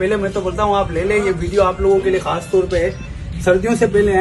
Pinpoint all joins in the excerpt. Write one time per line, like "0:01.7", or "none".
none